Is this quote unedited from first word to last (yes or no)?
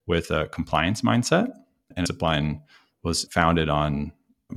no